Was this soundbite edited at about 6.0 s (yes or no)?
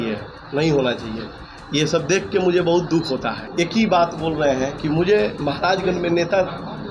no